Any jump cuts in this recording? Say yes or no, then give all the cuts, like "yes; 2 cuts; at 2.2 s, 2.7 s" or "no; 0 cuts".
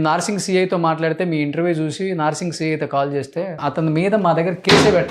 yes; 1 cut; at 3.6 s